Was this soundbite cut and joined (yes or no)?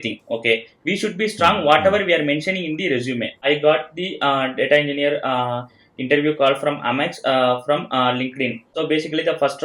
yes